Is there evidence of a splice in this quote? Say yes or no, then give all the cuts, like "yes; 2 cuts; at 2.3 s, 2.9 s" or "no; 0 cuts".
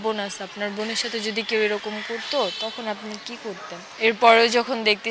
yes; 1 cut; at 3.9 s